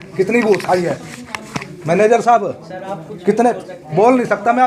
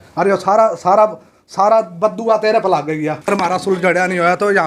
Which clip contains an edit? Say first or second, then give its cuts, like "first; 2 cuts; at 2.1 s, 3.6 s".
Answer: second; 1 cut; at 3.2 s